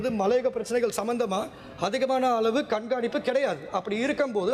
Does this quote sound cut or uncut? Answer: uncut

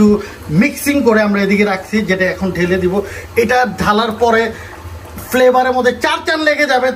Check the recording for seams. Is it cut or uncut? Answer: uncut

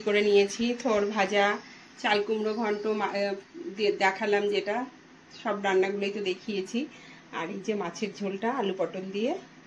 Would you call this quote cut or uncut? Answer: uncut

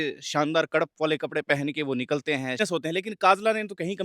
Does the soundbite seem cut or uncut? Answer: cut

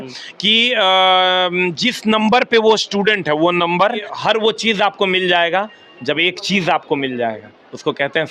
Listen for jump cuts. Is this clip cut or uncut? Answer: cut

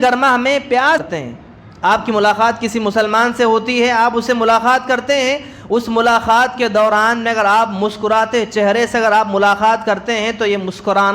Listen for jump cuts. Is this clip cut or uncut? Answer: cut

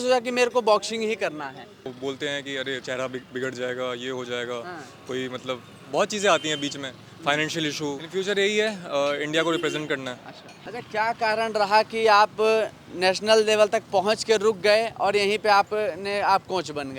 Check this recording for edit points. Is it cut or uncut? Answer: cut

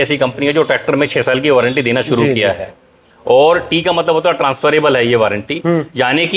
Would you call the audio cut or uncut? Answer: uncut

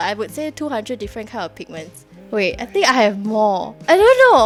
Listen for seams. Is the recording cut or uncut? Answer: uncut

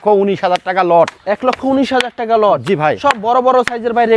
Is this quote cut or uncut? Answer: uncut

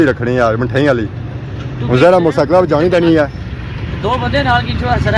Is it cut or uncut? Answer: uncut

